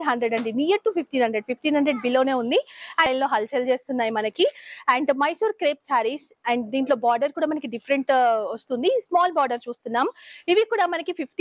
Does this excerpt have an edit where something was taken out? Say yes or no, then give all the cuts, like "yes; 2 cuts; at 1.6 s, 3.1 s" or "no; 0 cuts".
yes; 1 cut; at 3.1 s